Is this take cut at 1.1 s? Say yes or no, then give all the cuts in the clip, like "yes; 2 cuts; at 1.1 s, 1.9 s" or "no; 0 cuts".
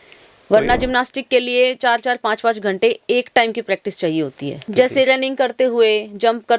no; 1 cut; at 4.7 s